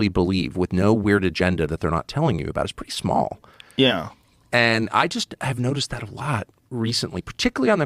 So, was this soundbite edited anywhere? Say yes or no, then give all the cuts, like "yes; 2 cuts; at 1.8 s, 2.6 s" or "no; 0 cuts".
no; 0 cuts